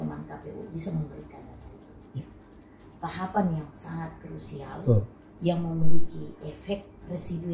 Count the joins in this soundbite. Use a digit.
1